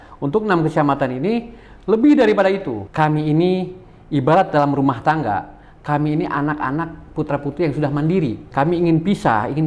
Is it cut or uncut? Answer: cut